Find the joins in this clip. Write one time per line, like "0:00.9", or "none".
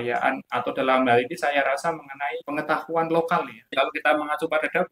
0:02.4
0:03.7